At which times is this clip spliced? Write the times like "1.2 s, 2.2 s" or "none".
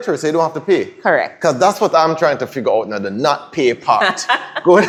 none

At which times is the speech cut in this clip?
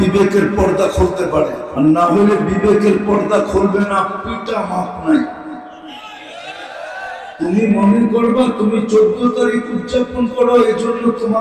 1.6 s

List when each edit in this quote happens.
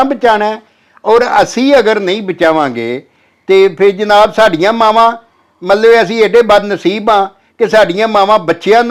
none

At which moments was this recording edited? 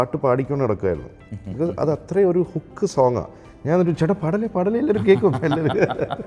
none

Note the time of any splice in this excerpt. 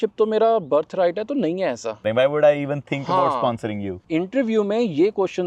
2.1 s, 4.0 s

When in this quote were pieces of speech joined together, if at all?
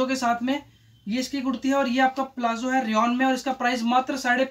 none

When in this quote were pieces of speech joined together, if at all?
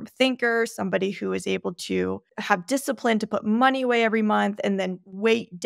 2.3 s

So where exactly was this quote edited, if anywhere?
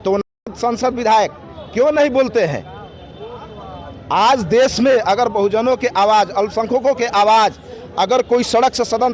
none

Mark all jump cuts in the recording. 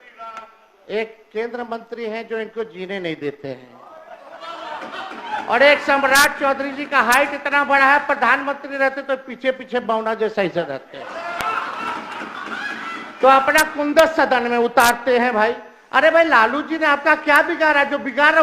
none

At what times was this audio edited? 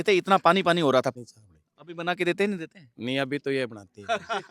1.1 s

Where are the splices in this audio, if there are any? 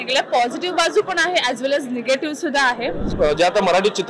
3.1 s

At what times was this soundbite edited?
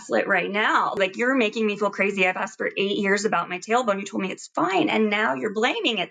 1.0 s

